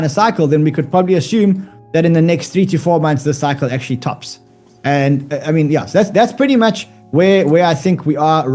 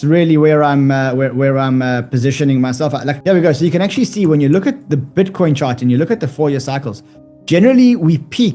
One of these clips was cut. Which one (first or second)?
second